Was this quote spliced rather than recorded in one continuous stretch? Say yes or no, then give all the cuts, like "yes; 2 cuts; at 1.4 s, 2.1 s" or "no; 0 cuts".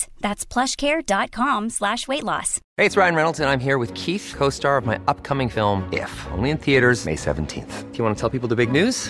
no; 0 cuts